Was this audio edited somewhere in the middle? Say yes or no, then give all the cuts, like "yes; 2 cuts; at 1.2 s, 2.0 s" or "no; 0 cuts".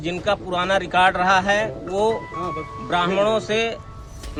no; 0 cuts